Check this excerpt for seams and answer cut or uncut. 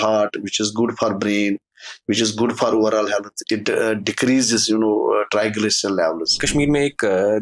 cut